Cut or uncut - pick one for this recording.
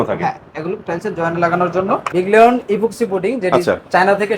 cut